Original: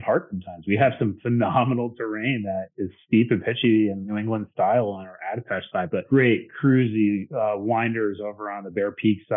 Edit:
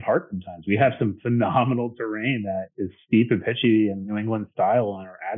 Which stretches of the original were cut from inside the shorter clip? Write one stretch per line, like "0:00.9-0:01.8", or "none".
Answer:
none